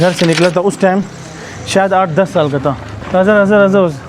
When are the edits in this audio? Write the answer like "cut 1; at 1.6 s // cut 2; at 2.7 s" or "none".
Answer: cut 1; at 2.9 s